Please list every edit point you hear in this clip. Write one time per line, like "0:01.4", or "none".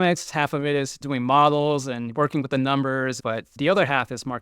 0:01.0
0:03.4